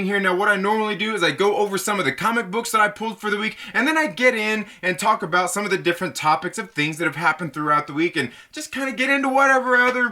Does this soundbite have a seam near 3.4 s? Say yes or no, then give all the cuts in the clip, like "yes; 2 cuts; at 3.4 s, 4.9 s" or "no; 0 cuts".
no; 1 cut; at 7.4 s